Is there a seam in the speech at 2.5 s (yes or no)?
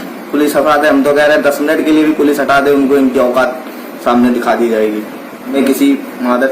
no